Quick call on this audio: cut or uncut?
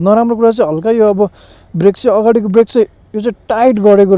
uncut